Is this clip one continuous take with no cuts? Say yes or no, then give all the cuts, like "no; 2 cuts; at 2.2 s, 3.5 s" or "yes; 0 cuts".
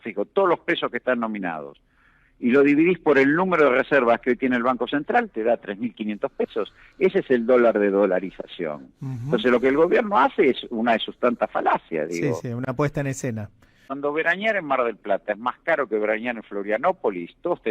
no; 1 cut; at 13.9 s